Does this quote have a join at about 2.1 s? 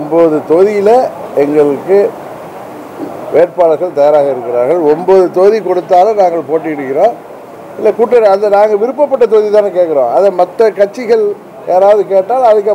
no; 0 cuts

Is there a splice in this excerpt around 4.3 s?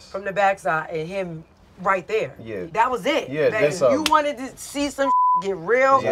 no; 1 cut; at 2.6 s

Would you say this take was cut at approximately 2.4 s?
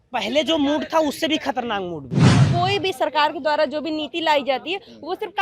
yes; 1 cut; at 2.4 s

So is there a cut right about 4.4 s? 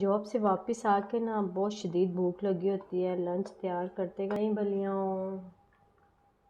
yes; 1 cut; at 4.4 s

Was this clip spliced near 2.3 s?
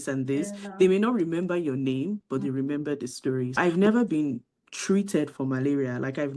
no; 1 cut; at 3.6 s

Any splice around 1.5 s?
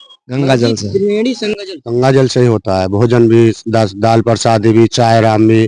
yes; 1 cut; at 1.5 s

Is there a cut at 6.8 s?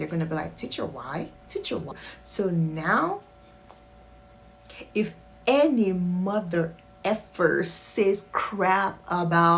no; 1 cut; at 2.0 s

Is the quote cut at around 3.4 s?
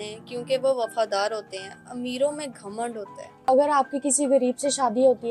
yes; 1 cut; at 3.4 s

